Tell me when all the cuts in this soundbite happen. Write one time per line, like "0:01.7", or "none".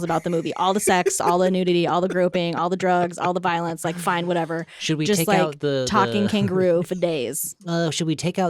none